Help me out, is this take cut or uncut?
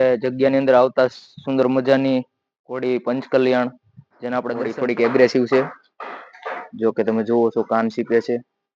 cut